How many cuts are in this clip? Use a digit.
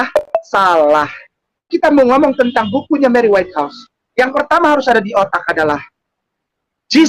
1